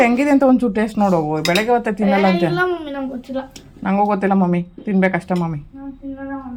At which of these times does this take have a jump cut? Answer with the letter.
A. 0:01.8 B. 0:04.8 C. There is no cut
C